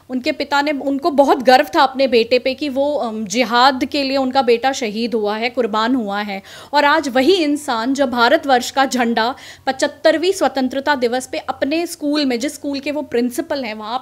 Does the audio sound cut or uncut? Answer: uncut